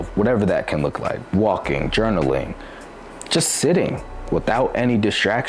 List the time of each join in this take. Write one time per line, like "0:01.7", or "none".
none